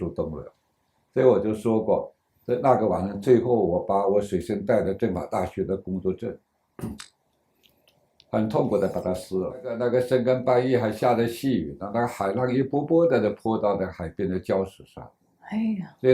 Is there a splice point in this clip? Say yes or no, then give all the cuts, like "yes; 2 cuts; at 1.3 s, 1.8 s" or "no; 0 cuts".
yes; 1 cut; at 9.7 s